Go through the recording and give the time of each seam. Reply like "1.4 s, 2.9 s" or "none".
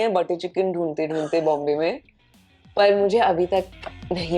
none